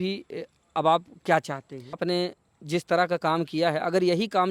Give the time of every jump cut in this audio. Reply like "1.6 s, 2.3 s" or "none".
2.0 s